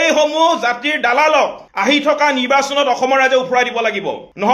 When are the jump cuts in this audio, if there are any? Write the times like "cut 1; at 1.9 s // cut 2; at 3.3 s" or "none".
none